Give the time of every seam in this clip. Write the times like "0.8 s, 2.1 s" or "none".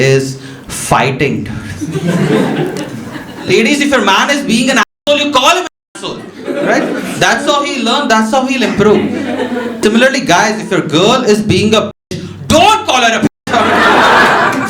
3.5 s, 9.8 s